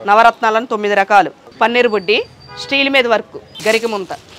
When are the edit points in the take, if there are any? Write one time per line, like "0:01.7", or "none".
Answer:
0:01.4
0:03.4